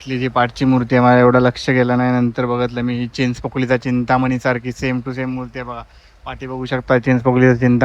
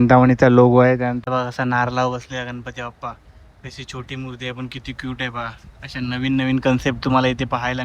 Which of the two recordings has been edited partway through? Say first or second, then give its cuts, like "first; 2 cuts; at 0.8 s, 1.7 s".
second; 1 cut; at 1.2 s